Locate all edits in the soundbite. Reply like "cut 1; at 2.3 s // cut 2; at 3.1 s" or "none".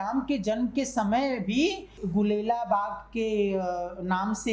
cut 1; at 2.0 s